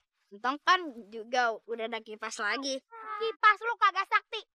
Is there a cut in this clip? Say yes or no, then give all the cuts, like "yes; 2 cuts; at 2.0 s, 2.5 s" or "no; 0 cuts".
yes; 1 cut; at 3.0 s